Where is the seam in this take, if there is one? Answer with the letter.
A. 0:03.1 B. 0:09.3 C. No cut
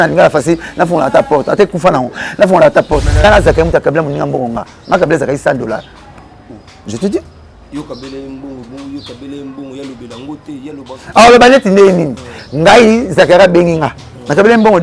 A